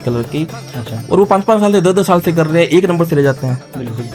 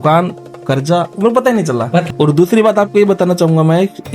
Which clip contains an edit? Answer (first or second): second